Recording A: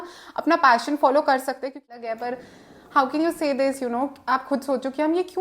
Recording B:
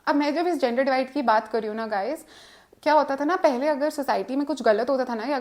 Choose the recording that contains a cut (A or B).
A